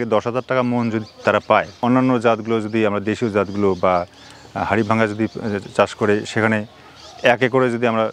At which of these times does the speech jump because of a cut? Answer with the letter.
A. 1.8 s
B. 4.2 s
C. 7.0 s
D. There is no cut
A